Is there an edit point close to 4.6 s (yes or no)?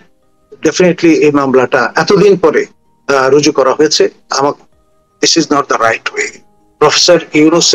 yes